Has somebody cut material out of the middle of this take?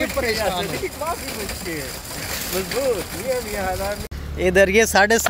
yes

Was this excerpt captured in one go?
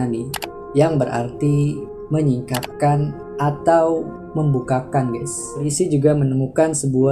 no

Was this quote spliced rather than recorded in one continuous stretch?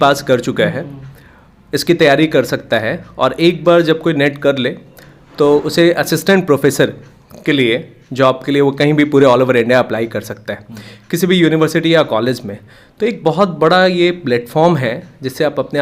no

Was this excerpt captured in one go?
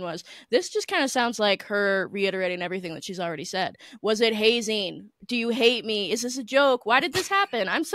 yes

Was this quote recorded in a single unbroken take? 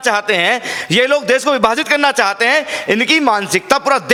yes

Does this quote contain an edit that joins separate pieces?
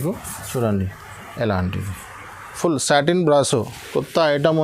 yes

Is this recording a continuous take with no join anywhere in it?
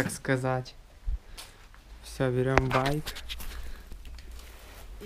yes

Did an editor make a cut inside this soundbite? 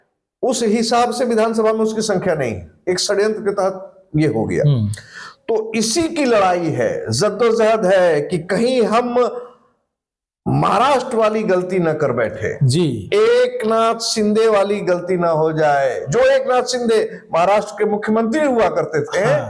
no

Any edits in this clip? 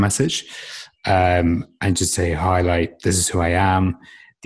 no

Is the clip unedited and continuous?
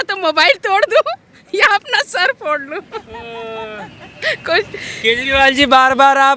yes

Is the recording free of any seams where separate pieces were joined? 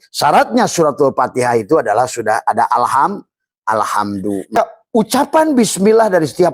no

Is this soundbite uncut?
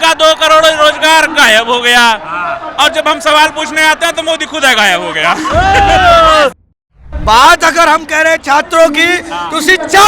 no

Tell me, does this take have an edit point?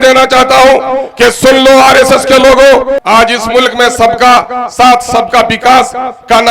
yes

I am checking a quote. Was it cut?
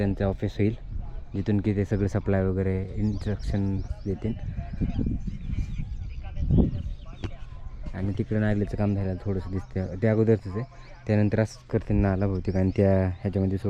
no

